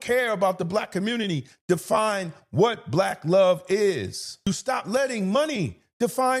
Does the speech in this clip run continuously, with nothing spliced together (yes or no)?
no